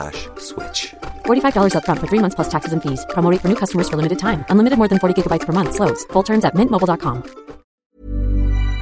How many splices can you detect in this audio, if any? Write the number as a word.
one